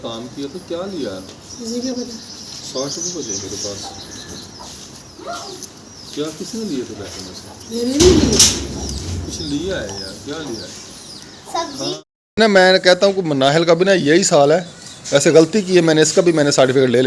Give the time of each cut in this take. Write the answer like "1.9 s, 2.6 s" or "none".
5.1 s, 12.0 s